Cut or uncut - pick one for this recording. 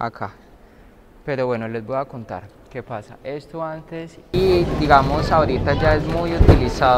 cut